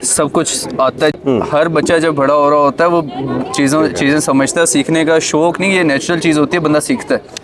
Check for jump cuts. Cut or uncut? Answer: cut